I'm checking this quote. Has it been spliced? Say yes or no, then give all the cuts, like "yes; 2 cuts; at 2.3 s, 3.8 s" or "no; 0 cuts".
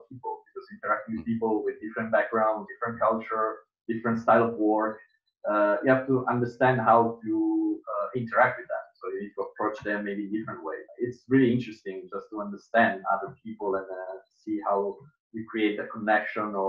yes; 1 cut; at 10.9 s